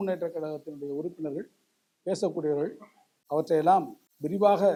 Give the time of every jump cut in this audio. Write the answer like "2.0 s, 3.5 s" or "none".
none